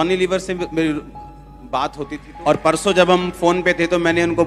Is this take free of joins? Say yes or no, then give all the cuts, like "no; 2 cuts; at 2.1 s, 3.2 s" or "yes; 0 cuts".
no; 1 cut; at 2.2 s